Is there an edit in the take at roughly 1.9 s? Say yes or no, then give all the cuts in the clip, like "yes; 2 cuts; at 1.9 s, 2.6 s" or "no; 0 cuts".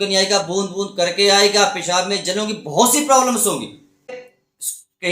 no; 1 cut; at 4.1 s